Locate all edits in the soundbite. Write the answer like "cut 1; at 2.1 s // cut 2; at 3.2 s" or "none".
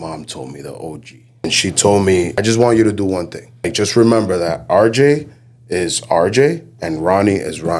cut 1; at 1.4 s // cut 2; at 2.4 s // cut 3; at 3.7 s